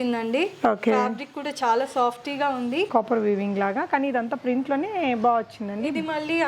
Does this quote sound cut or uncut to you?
cut